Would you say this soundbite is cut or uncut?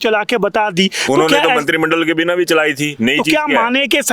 uncut